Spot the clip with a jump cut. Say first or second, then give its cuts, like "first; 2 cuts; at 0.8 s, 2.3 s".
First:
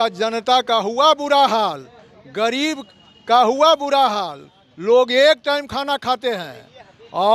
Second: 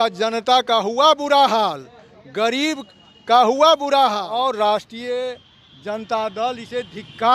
second; 1 cut; at 4.5 s